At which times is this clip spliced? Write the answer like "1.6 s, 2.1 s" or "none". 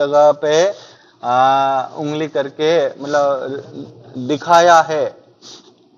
none